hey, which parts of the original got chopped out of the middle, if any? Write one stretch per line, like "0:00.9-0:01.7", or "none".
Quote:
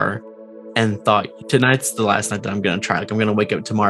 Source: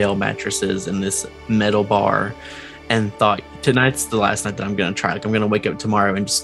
none

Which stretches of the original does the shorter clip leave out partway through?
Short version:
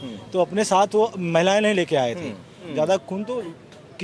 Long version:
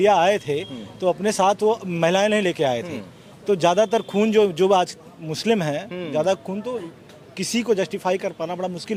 0:03.2-0:05.9

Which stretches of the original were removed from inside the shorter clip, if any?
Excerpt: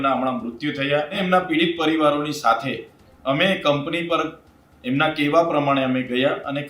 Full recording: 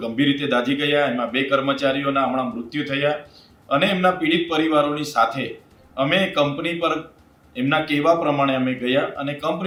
0:03.3-0:03.9

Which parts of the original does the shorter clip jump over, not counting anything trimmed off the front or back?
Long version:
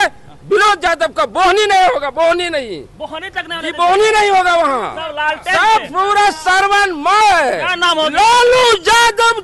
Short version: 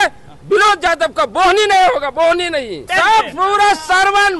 0:02.9-0:05.4

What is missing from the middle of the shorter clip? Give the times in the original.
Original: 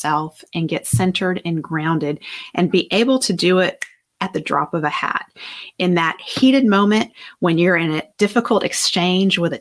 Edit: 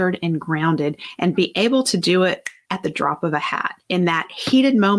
0:02.3-0:02.4
0:03.9-0:04.0
0:05.2-0:05.6

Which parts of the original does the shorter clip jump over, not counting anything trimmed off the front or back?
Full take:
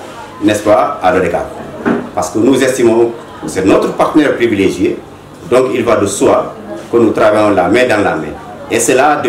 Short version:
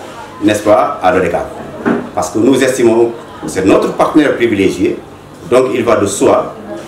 none

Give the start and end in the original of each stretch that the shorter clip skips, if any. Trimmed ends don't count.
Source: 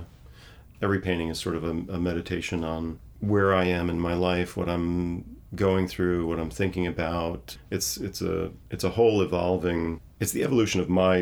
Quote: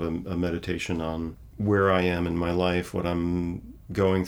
none

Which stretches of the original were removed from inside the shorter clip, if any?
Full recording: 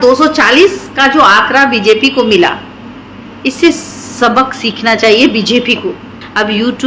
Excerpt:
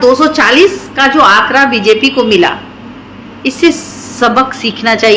none

